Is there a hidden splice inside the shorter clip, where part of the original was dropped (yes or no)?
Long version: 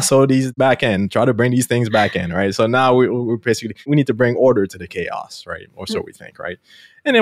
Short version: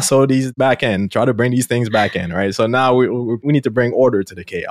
yes